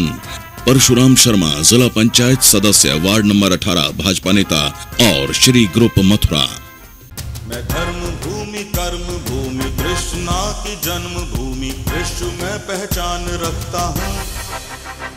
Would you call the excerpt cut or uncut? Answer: cut